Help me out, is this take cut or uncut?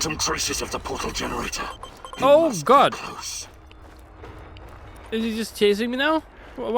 cut